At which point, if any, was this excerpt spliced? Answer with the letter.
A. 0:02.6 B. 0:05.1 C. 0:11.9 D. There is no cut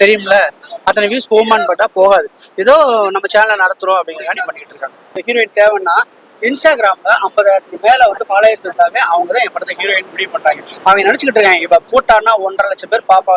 B